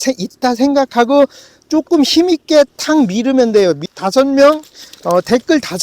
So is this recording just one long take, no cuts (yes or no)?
no